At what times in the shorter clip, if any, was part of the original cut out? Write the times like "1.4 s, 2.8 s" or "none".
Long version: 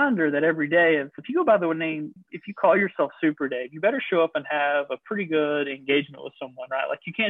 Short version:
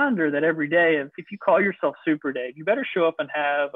1.2 s